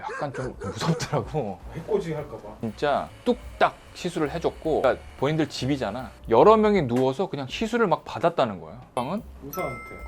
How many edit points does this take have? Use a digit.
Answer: 3